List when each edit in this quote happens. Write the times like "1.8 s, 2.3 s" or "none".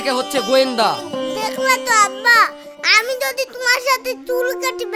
none

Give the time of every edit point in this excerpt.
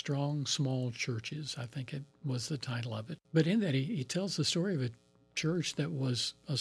3.2 s

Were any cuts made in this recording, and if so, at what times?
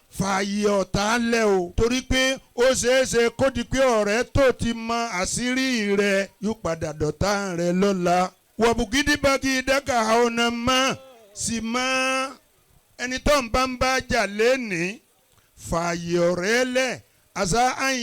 1.7 s, 6.3 s, 8.4 s

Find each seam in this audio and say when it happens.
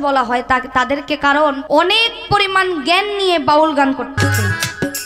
1.6 s, 4.1 s

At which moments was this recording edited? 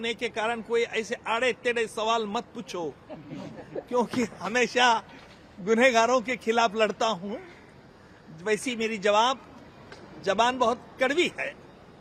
none

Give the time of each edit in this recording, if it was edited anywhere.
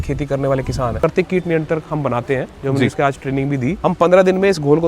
1.1 s, 3.8 s

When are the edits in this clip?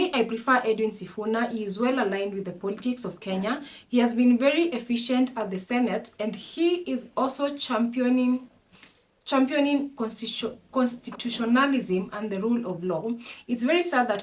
none

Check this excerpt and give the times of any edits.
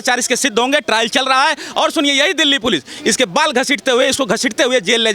none

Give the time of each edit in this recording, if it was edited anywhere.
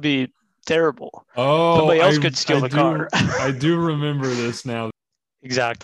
4.9 s

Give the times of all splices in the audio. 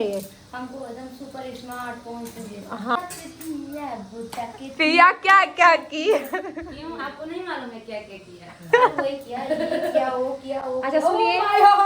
3.0 s

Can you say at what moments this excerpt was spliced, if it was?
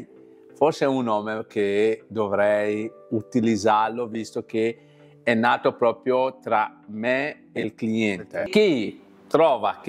8.5 s

